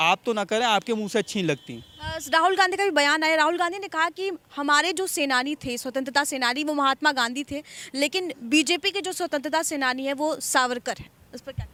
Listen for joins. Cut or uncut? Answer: uncut